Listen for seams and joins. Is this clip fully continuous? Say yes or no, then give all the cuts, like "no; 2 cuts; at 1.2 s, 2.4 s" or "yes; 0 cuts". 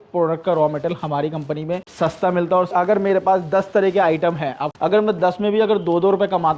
no; 3 cuts; at 1.9 s, 2.7 s, 4.6 s